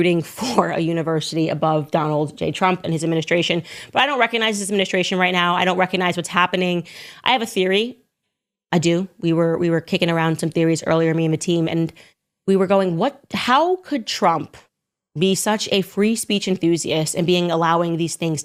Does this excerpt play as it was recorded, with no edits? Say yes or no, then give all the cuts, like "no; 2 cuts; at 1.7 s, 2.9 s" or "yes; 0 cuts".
yes; 0 cuts